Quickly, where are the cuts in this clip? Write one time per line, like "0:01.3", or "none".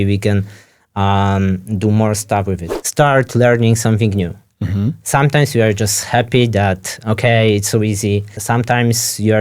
0:02.7
0:08.4